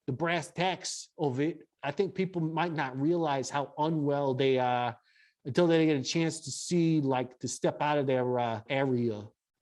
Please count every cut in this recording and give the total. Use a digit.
2